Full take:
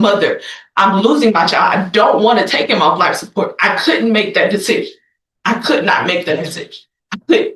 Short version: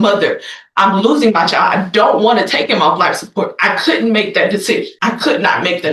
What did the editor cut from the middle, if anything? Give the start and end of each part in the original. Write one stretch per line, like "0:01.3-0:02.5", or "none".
0:04.9-0:05.4

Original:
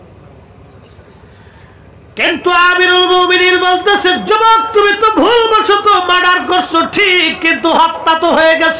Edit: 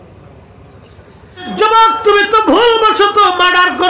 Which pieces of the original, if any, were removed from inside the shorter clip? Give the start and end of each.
0:01.5-0:04.2

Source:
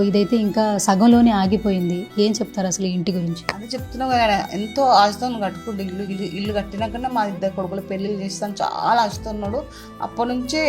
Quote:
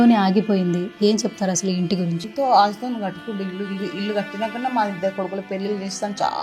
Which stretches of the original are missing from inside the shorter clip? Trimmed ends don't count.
0:03.4-0:04.7

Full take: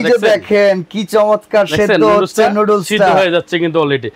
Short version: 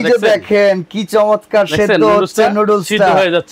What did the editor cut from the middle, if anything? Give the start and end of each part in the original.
none

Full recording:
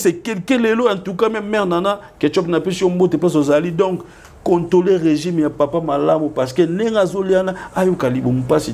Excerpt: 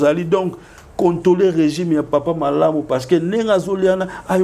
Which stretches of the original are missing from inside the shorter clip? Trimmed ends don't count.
none

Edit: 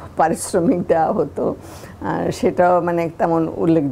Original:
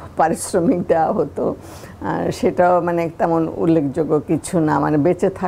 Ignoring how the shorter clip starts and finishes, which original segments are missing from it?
none

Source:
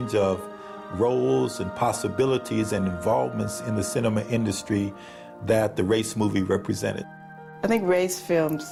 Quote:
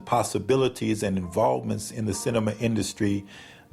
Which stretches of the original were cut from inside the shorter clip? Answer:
none

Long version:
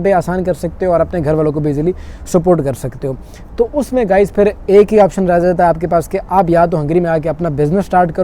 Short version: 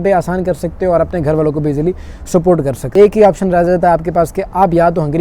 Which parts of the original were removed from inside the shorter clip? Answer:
0:02.9-0:04.6

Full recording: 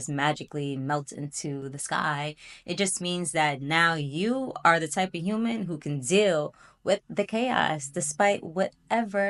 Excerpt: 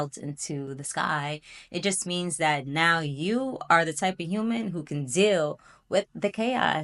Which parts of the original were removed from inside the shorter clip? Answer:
none

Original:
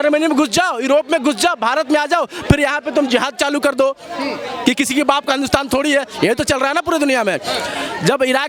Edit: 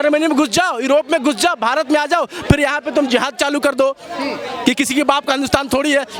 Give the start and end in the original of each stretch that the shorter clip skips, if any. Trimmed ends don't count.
none

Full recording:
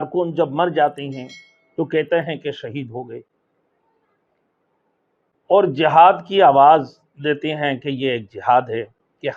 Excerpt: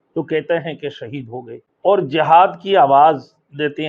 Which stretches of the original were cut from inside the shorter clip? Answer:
0:03.2-0:05.3

